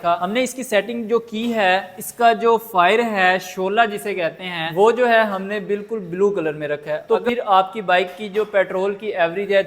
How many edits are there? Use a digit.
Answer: 1